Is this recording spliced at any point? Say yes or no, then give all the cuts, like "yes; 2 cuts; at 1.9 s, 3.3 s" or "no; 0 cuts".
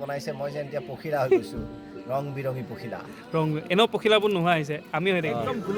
no; 0 cuts